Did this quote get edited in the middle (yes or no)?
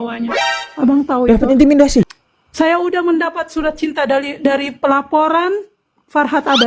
yes